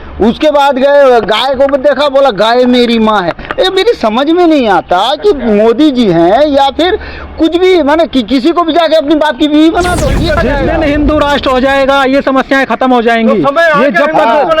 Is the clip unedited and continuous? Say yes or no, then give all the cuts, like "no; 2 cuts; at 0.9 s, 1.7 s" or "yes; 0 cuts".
no; 1 cut; at 10.4 s